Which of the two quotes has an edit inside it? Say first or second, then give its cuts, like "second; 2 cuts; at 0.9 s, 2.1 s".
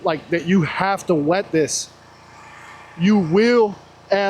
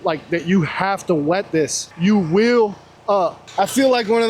second; 2 cuts; at 1.8 s, 3.0 s